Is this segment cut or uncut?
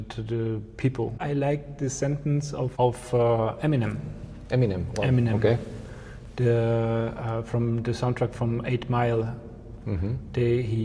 cut